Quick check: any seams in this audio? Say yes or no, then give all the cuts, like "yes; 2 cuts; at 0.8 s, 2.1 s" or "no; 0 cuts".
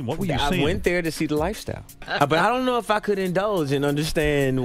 yes; 1 cut; at 1.9 s